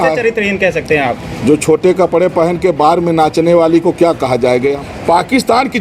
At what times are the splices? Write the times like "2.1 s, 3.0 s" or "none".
1.2 s, 4.8 s